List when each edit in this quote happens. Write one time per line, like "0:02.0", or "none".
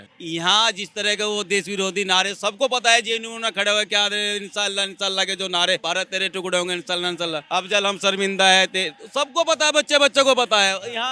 0:05.8
0:07.4